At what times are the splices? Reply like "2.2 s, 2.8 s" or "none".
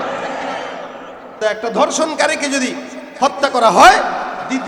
1.4 s